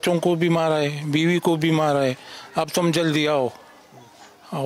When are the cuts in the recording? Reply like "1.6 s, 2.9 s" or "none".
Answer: none